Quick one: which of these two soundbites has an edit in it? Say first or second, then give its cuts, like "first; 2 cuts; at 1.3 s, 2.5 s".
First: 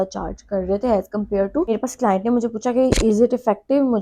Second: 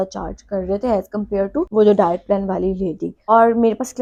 first; 1 cut; at 1.7 s